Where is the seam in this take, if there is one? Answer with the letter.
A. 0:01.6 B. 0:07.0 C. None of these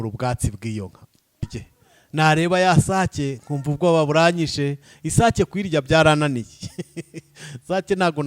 A